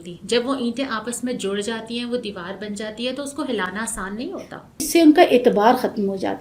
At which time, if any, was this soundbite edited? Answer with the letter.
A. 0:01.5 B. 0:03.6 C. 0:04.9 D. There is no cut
C